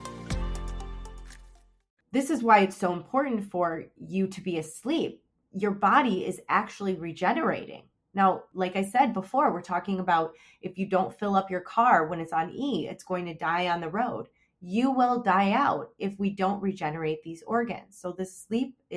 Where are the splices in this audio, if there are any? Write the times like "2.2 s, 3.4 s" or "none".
1.9 s, 8.5 s